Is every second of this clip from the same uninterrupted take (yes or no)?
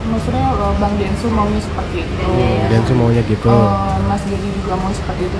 yes